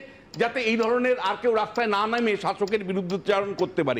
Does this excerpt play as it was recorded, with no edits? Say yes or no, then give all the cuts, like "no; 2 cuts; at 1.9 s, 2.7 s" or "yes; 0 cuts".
yes; 0 cuts